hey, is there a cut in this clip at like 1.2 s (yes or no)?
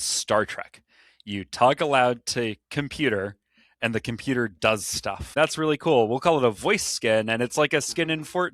no